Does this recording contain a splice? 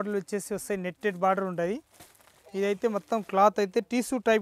no; 0 cuts

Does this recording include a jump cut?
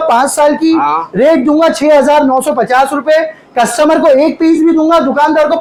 no; 0 cuts

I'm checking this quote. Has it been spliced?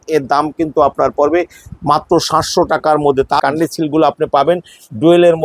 yes; 1 cut; at 3.4 s

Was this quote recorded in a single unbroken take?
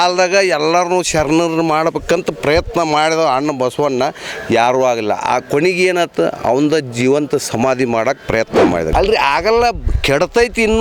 no; 1 cut; at 8.9 s

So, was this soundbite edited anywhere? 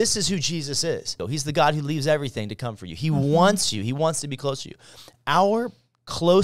yes; 1 cut; at 1.2 s

